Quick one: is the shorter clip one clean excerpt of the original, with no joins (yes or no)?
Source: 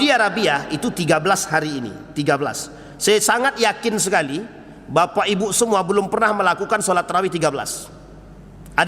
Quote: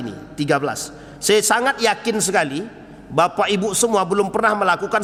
yes